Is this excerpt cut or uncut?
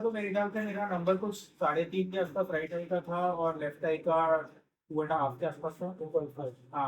uncut